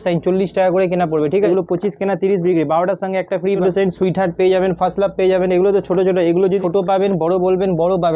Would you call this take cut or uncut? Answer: cut